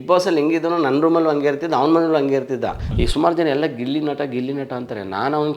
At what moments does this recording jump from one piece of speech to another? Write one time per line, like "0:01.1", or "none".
0:02.9